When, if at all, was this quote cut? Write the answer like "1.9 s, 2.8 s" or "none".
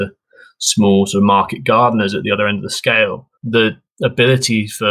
3.3 s, 3.9 s